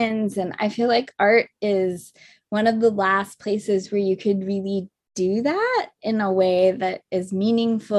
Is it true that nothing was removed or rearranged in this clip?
yes; 0 cuts

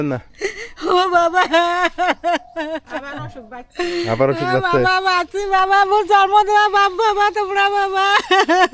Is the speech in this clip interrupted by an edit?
no; 0 cuts

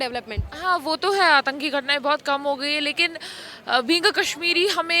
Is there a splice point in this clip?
no; 0 cuts

